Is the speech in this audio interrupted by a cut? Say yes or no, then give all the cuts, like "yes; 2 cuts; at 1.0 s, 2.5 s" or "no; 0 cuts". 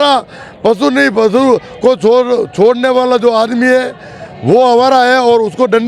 no; 0 cuts